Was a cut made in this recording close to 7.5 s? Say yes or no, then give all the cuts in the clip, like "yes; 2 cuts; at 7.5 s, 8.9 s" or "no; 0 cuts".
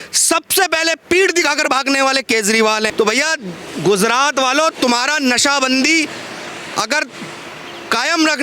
no; 1 cut; at 2.9 s